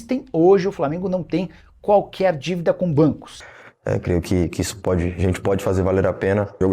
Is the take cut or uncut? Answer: cut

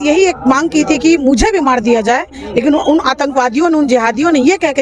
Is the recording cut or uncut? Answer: uncut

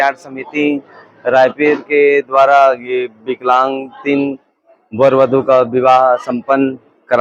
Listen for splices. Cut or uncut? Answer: uncut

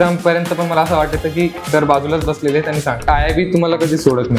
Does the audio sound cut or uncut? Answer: cut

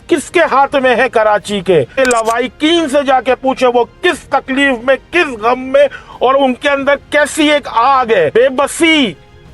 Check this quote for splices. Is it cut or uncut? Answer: cut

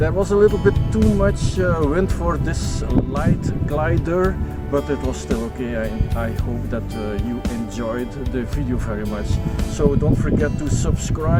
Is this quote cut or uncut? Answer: uncut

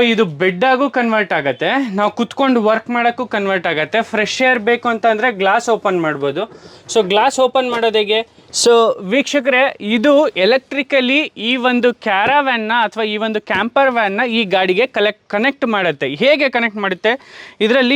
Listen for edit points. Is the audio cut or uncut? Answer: cut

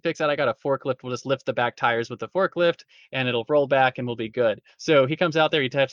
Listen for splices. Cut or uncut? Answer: uncut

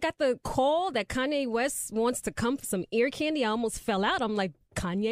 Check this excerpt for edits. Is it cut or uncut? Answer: uncut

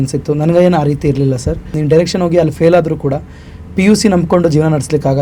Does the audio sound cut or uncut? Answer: cut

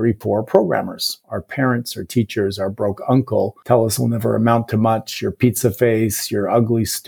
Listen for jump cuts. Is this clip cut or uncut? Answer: cut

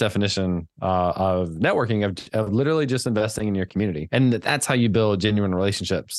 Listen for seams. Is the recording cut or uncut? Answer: cut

